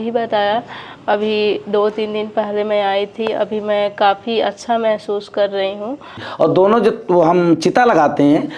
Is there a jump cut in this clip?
yes; 1 cut; at 6.3 s

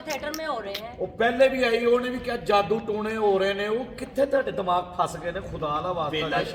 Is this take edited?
no; 0 cuts

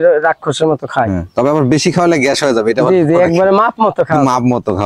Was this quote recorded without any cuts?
yes; 0 cuts

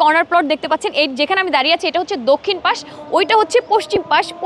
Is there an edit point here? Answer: no; 0 cuts

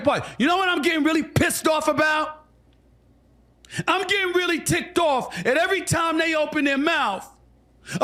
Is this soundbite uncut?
yes; 0 cuts

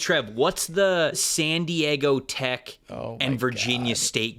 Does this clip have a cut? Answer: yes; 1 cut; at 1.3 s

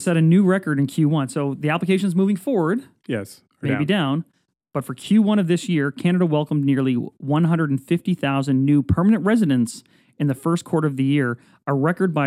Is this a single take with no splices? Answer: yes; 0 cuts

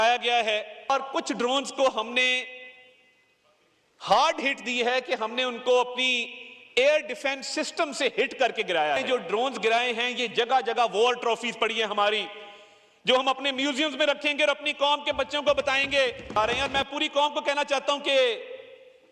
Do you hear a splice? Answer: yes; 3 cuts; at 0.9 s, 9.0 s, 16.4 s

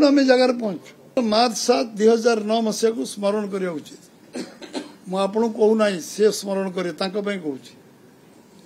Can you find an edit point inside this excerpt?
yes; 1 cut; at 1.2 s

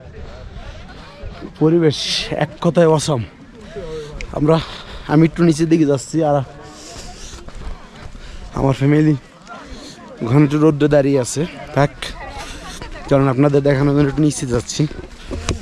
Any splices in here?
no; 0 cuts

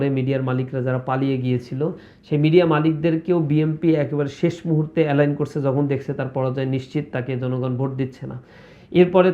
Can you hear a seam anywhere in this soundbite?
no; 0 cuts

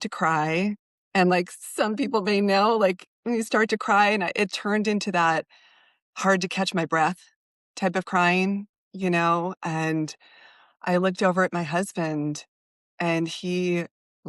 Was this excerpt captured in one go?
yes; 0 cuts

